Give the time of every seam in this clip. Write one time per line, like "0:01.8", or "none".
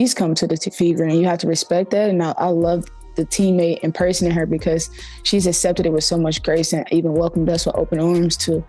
0:02.2